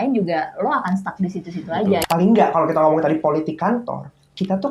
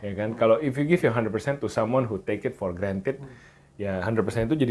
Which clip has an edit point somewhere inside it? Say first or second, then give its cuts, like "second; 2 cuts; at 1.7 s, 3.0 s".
first; 1 cut; at 2.1 s